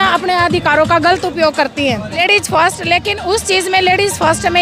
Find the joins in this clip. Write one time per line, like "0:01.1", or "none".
0:02.2